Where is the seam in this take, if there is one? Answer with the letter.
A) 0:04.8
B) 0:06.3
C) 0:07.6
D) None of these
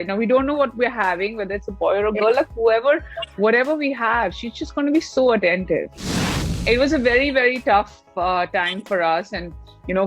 B